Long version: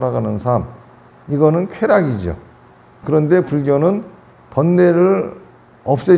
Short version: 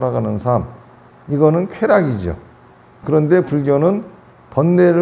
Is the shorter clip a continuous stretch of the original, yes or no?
yes